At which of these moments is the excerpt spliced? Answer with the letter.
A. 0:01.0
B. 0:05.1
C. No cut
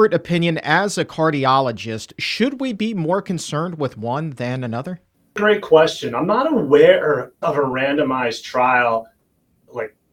C